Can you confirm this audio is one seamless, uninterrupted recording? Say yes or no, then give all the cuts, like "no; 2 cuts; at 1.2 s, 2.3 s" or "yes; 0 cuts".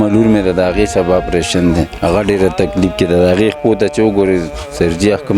yes; 0 cuts